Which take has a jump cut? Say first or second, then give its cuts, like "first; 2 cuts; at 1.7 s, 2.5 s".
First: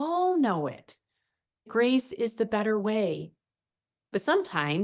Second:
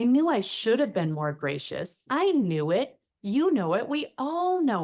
first; 1 cut; at 1.7 s